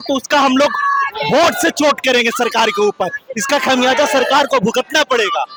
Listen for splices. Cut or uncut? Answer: uncut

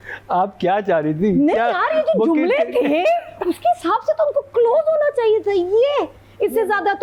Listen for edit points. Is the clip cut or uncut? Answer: uncut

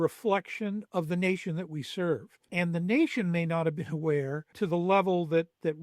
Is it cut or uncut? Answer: cut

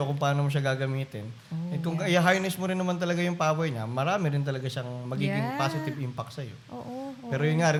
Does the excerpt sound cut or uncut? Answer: uncut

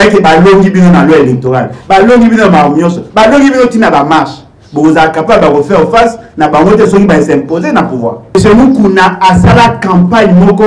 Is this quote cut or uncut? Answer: cut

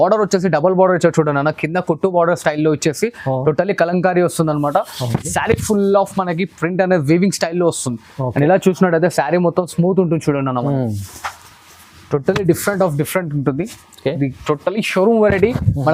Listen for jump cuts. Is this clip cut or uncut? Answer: uncut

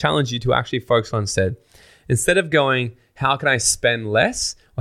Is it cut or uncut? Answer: uncut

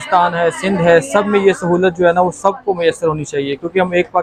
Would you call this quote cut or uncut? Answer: uncut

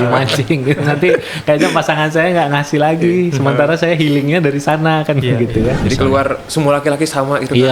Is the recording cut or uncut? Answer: cut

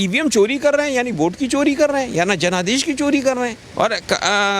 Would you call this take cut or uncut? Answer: cut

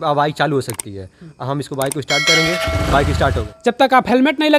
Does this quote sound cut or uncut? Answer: cut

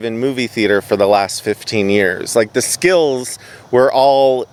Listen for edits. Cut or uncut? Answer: uncut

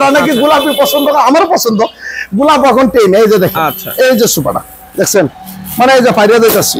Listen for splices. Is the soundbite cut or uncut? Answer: uncut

